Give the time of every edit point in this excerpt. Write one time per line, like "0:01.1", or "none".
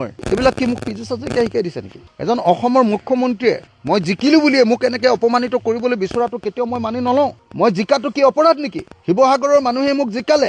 0:02.0